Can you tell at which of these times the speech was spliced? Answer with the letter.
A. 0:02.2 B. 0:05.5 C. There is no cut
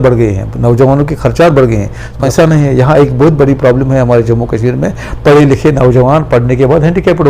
A